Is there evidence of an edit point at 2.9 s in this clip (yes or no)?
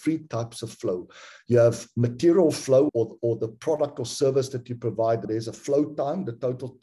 yes